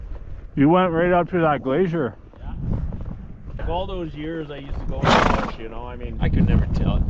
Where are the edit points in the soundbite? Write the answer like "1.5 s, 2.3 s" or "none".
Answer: 3.6 s